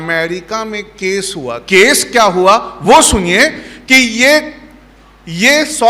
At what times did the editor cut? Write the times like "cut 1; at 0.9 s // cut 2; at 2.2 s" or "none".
cut 1; at 1.6 s